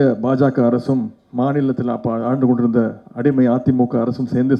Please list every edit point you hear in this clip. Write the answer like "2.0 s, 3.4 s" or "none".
none